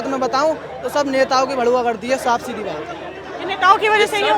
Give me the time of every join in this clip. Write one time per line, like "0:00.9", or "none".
none